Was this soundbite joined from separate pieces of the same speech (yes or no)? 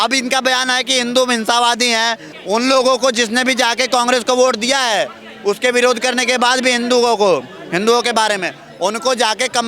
yes